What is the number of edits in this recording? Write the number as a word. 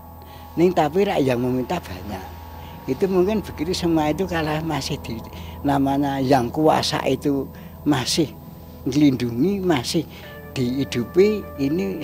zero